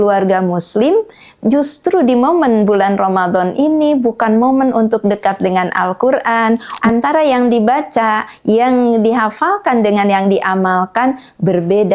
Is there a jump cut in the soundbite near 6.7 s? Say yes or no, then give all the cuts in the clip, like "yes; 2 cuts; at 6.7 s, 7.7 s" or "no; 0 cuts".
yes; 1 cut; at 6.7 s